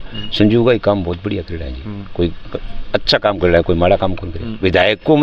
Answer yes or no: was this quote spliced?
no